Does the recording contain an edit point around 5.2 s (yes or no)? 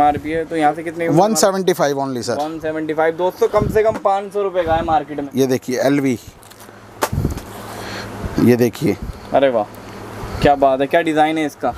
yes